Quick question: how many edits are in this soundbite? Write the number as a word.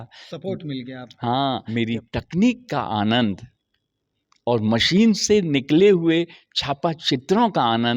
one